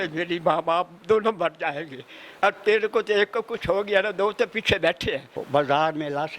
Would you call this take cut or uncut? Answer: cut